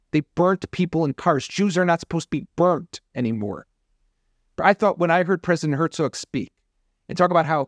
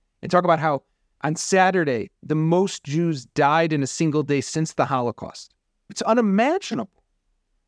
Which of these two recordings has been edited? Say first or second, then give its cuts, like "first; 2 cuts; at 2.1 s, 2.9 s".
second; 1 cut; at 6.0 s